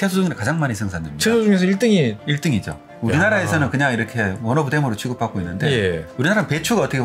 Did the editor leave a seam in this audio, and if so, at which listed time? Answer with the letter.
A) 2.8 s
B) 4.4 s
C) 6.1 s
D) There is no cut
C